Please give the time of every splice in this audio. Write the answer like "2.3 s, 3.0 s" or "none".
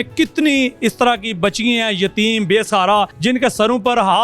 3.1 s

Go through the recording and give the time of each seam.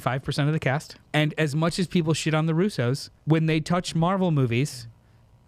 1.0 s, 3.1 s

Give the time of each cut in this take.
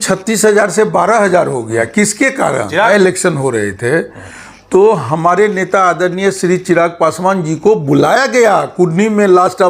2.9 s

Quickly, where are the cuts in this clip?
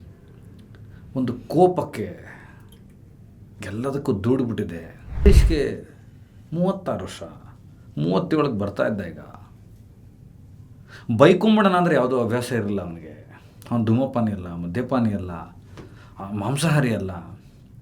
5.2 s

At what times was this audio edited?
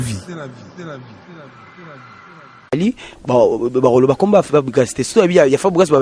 none

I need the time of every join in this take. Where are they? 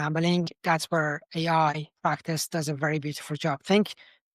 1.9 s

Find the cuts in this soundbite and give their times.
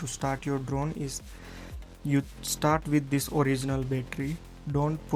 none

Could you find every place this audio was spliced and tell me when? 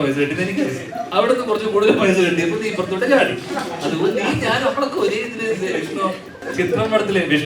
6.4 s

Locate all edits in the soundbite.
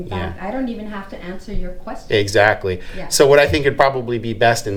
none

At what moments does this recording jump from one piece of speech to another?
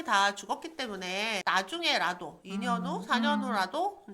1.4 s

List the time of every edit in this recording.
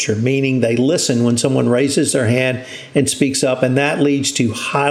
none

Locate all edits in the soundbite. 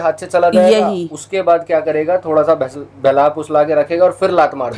none

